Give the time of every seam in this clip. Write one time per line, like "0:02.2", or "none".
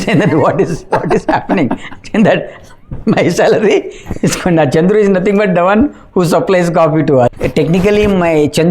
0:07.4

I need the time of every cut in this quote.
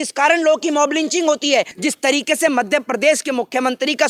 0:01.8

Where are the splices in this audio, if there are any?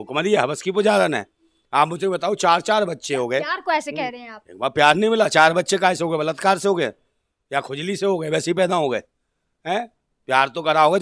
none

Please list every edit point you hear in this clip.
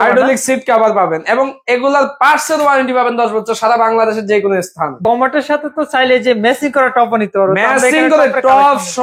0:05.0

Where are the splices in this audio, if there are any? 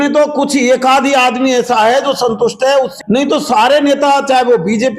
0:02.9

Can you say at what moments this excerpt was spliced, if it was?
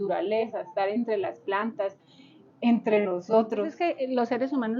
0:03.7

